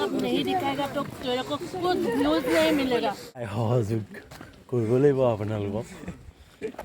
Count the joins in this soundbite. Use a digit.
1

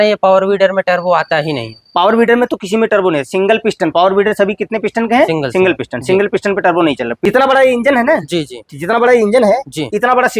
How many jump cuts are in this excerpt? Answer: 1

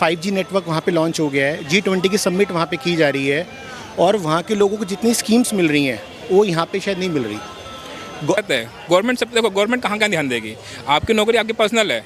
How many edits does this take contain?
1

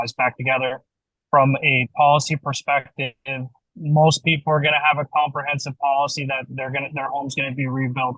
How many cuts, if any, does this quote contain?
1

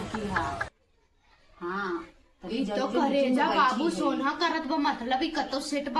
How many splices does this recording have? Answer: 0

